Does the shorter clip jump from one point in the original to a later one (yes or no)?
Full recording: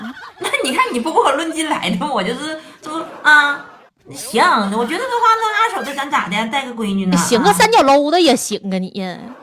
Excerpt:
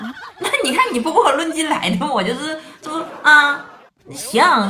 no